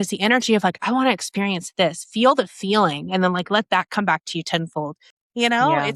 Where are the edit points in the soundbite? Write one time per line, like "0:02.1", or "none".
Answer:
0:05.0

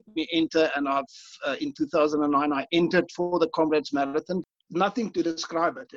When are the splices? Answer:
0:04.4

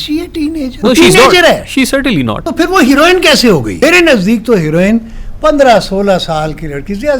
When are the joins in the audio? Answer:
0:00.8
0:02.4
0:03.7

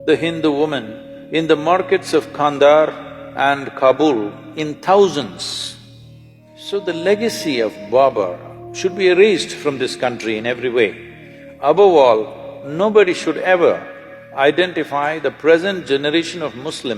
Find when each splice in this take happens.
0:06.5

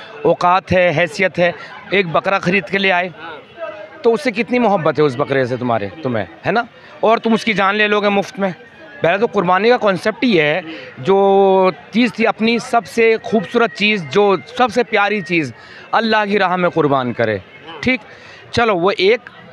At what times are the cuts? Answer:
none

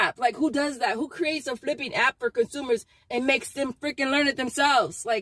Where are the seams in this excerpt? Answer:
none

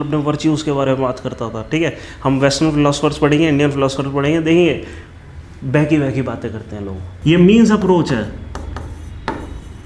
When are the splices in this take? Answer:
0:07.0

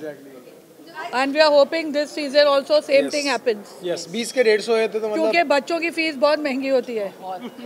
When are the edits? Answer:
0:01.0

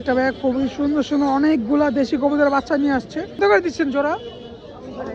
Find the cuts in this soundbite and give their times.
0:03.4

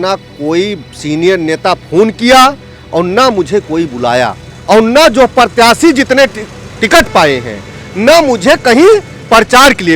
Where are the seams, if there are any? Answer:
0:04.5

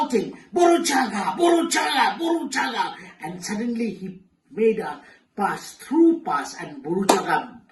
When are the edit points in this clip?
none

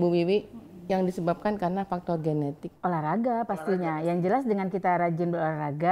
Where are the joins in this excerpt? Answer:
0:02.7

